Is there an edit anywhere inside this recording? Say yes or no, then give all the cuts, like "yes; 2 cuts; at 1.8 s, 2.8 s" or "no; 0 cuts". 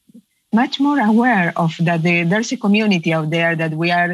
no; 0 cuts